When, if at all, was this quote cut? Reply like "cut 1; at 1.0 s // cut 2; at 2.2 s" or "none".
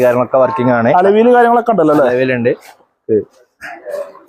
none